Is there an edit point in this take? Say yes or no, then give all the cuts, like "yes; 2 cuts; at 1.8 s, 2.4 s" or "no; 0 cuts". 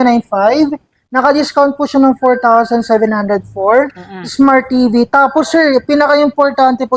no; 0 cuts